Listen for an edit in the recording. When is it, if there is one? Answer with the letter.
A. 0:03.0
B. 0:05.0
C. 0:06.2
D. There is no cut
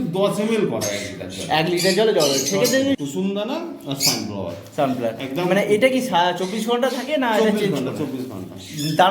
A